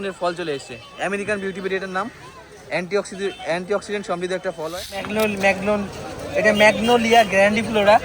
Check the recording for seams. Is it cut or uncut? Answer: cut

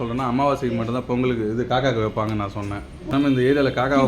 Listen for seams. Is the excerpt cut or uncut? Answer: cut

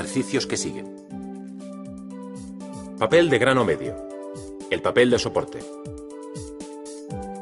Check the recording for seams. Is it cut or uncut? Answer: cut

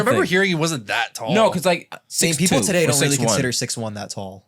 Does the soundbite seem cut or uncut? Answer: cut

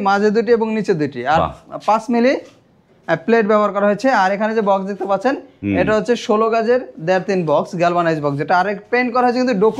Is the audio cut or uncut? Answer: uncut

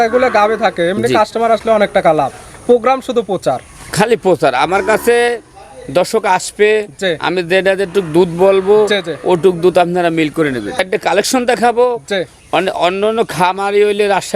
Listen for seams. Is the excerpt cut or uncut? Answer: cut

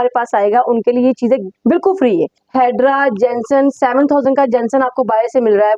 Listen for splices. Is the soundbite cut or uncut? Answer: cut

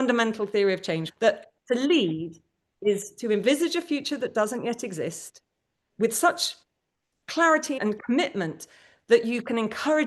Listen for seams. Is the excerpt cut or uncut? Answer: cut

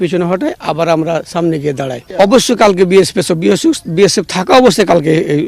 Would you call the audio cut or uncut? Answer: cut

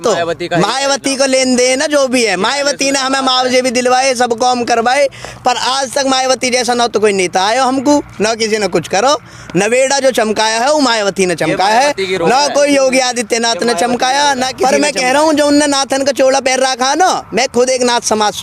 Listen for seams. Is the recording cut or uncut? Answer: uncut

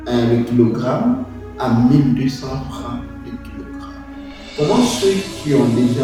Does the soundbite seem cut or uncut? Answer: uncut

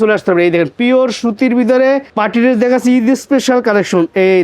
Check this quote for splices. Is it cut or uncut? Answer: cut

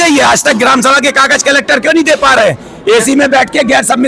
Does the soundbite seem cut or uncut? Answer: uncut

